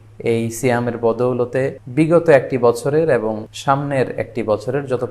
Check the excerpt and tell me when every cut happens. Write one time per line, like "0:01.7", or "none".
0:01.8
0:03.5